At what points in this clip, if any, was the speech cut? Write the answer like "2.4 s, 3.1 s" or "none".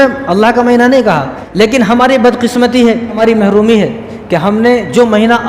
1.4 s, 3.2 s